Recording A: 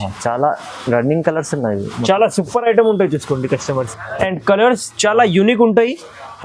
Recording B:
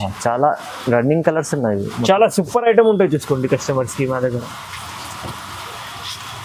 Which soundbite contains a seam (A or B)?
A